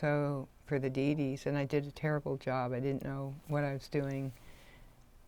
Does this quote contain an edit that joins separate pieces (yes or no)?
no